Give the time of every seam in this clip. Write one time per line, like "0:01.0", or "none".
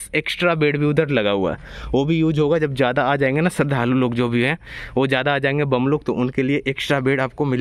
none

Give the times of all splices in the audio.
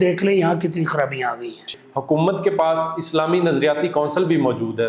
0:01.7

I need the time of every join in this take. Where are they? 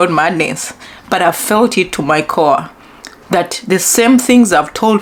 none

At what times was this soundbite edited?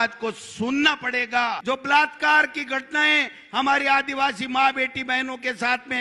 0:01.5

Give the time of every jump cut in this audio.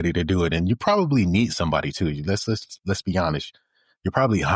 none

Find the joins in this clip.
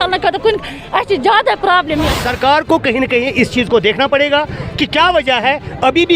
0:02.1

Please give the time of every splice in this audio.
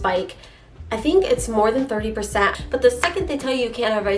0:02.5

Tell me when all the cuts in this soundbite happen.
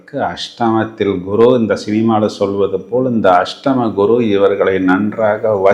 none

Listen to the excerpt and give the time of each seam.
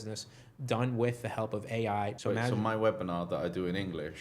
0:02.2

